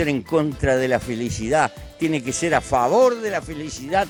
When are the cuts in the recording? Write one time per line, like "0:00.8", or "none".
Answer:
none